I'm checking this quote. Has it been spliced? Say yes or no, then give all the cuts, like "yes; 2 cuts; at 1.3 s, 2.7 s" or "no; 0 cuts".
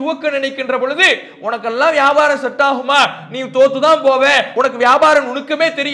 yes; 1 cut; at 4.5 s